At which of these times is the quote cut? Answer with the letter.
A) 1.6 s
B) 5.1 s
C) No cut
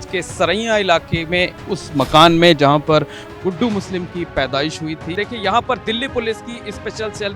B